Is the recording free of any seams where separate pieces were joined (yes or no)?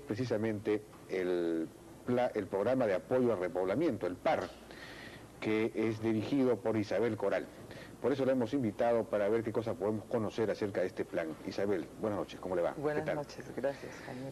no